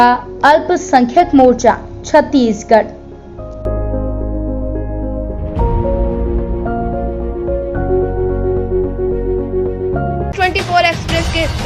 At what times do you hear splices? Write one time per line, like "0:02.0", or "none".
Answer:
0:10.3